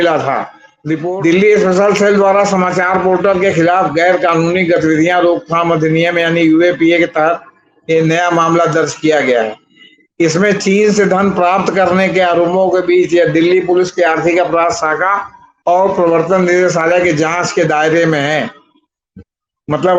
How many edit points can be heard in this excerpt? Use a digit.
1